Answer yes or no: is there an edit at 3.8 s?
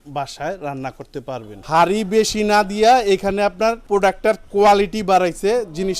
yes